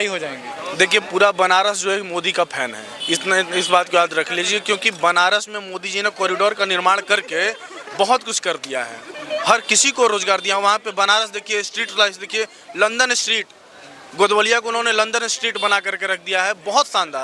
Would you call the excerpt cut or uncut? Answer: uncut